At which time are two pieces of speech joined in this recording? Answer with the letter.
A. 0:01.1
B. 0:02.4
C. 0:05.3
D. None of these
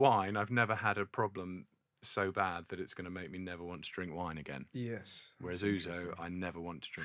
D